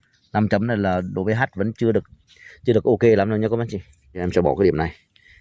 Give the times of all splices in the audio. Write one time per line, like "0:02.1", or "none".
0:04.2